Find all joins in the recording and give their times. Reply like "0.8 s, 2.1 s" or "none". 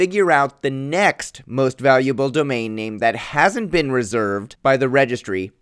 4.1 s